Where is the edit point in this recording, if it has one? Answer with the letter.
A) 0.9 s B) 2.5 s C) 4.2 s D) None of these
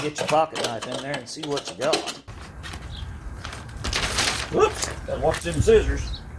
B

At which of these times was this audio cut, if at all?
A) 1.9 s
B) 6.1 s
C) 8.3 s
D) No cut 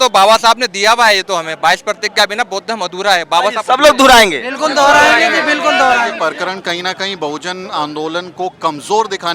B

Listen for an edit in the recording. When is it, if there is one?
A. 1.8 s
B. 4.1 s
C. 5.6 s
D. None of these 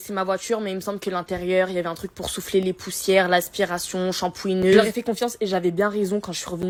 D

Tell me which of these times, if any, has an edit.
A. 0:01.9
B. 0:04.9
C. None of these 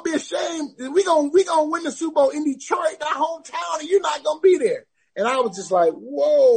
C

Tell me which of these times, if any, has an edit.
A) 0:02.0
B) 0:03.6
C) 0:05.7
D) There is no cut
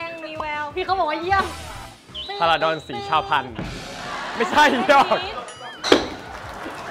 C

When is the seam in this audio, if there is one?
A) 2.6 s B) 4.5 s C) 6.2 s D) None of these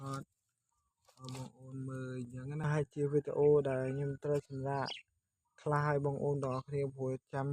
A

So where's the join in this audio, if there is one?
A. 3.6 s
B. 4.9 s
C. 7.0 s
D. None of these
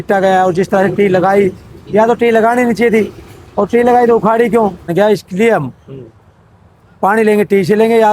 B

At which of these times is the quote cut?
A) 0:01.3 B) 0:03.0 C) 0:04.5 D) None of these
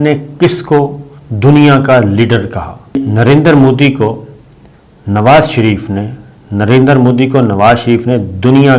B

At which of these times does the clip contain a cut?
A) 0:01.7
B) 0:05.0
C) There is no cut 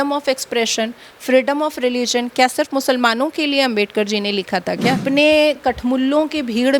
B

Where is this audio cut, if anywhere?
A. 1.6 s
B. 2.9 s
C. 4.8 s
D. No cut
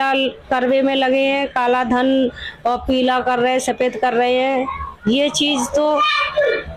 D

